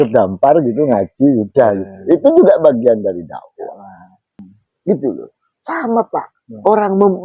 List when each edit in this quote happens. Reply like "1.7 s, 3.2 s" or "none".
4.4 s